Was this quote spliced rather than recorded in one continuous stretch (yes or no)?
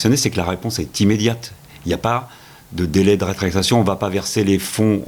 no